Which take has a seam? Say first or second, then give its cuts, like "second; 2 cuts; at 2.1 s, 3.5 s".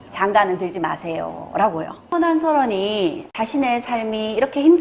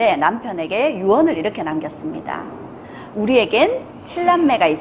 first; 1 cut; at 2.1 s